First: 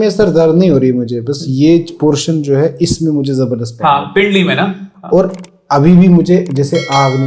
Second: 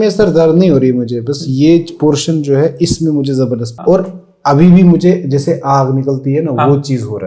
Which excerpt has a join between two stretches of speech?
second; 1 cut; at 3.7 s

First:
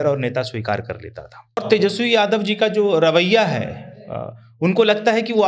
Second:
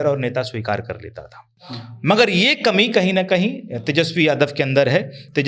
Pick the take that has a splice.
first; 1 cut; at 1.6 s

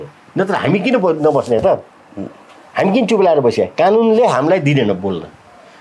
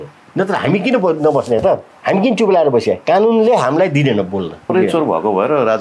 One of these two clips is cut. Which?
second; 2 cuts; at 1.9 s, 4.7 s

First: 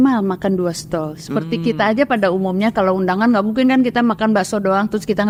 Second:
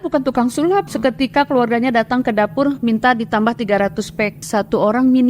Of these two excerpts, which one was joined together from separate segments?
second; 2 cuts; at 0.9 s, 4.5 s

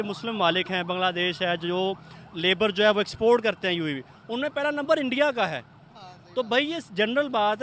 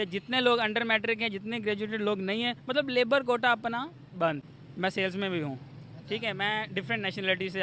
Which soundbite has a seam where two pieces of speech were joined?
second; 1 cut; at 4.6 s

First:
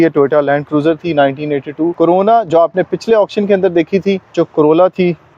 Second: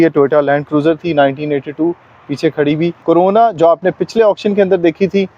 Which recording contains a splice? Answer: first; 2 cuts; at 1.9 s, 4.3 s

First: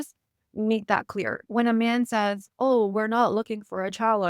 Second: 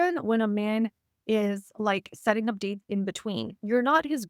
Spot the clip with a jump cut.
first; 1 cut; at 1.4 s

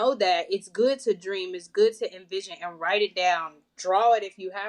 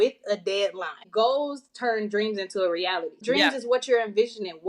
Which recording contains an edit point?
second; 2 cuts; at 1.0 s, 3.2 s

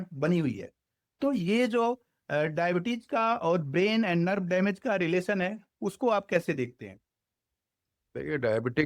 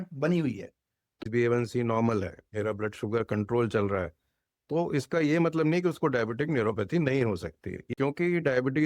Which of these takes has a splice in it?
second; 2 cuts; at 1.2 s, 7.9 s

